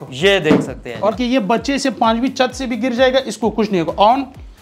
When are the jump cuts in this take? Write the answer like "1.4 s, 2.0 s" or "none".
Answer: 1.1 s